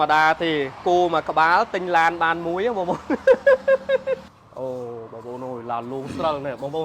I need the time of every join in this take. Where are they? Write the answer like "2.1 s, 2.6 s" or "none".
4.3 s